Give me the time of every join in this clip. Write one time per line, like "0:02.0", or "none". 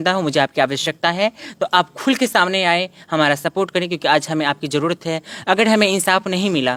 none